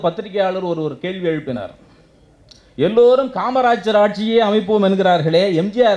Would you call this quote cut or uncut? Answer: uncut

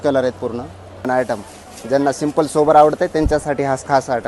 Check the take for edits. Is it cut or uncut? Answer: cut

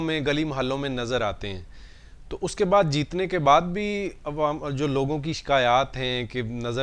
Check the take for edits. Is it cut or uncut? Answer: uncut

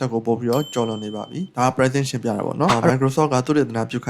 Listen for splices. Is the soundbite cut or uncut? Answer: cut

